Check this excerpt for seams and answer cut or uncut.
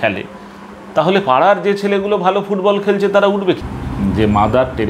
cut